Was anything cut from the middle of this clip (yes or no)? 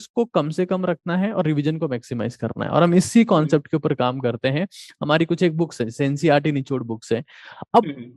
no